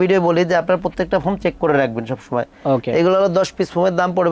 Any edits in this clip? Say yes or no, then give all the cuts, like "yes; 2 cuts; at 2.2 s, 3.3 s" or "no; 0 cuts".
no; 0 cuts